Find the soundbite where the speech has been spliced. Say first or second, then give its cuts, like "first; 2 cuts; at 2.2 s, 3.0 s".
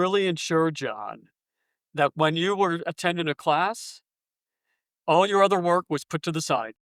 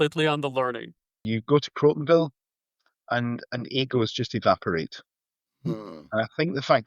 second; 1 cut; at 1.3 s